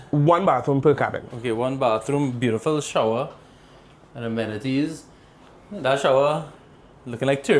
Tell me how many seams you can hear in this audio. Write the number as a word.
zero